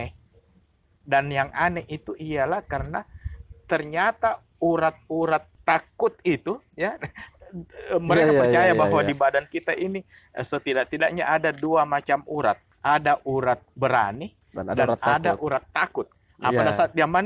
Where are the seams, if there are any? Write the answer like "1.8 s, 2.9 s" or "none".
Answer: 5.5 s, 12.7 s